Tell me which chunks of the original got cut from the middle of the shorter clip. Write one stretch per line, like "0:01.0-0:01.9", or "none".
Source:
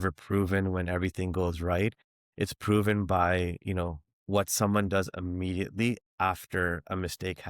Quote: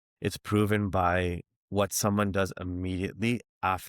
0:03.6-0:04.0